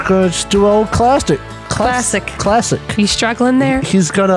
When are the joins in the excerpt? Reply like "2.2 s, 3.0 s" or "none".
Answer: 1.6 s